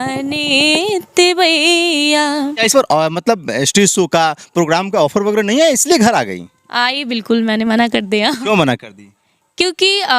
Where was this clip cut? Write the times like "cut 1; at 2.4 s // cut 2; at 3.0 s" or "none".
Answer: cut 1; at 2.6 s